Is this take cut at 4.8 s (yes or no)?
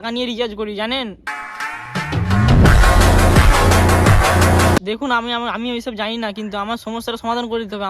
yes